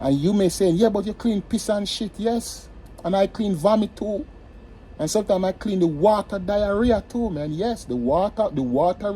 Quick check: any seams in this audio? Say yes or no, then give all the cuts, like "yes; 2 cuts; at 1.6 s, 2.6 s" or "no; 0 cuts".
no; 0 cuts